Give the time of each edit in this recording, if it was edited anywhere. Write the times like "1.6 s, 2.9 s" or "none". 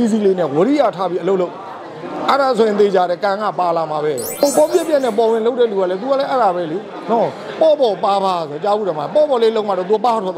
4.3 s